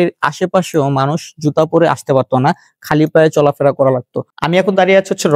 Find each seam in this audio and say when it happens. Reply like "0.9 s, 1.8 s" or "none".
4.2 s